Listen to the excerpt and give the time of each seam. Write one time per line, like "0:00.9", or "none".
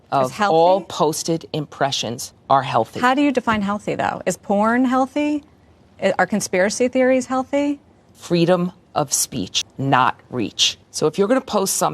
0:08.1